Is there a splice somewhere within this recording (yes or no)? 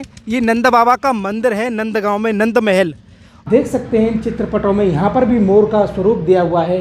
yes